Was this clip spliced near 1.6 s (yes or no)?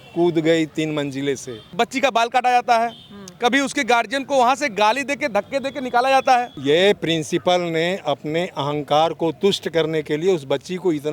yes